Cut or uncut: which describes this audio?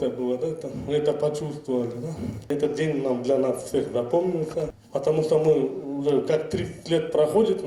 cut